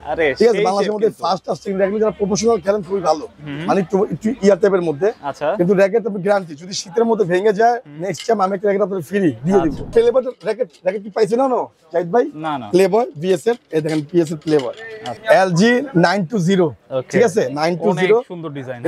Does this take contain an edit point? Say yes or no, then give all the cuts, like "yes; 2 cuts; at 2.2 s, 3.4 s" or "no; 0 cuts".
yes; 2 cuts; at 9.8 s, 15.2 s